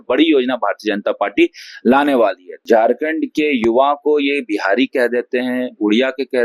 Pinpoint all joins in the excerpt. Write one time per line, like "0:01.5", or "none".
0:02.5